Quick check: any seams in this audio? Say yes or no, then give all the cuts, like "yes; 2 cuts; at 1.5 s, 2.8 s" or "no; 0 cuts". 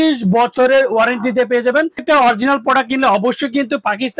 yes; 1 cut; at 2.0 s